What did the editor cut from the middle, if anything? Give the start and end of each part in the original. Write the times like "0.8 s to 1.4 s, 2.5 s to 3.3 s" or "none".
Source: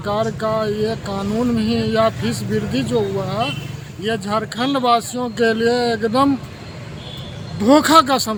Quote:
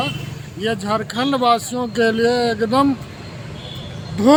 none